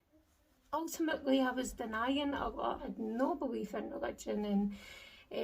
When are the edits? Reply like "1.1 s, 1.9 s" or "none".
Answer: 2.8 s